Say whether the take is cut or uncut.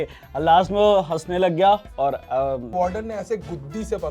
cut